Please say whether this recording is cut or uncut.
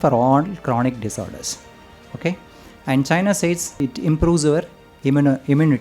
cut